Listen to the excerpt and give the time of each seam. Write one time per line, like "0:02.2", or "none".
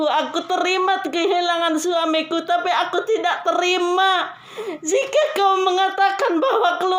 none

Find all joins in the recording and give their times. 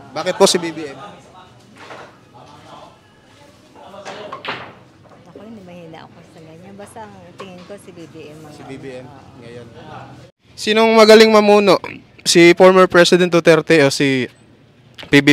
0:10.2

